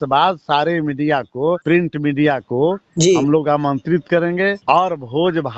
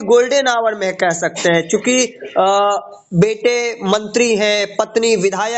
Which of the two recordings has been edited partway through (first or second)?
first